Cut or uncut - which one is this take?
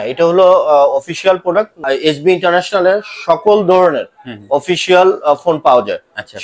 cut